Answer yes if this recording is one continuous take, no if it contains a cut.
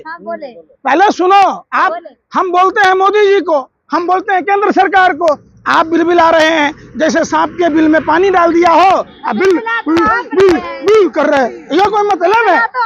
yes